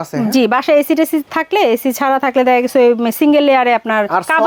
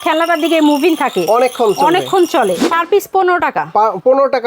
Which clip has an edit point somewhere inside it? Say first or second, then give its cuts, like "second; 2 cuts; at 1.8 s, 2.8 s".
second; 1 cut; at 2.6 s